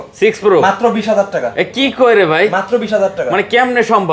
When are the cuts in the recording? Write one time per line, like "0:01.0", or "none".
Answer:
none